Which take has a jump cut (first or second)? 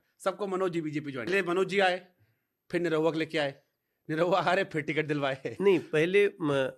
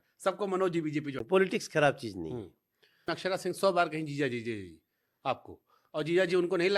second